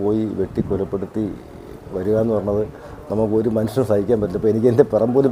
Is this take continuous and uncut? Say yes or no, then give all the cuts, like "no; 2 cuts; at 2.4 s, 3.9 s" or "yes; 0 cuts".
yes; 0 cuts